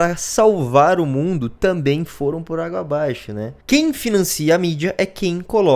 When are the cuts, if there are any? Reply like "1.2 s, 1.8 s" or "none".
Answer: 3.5 s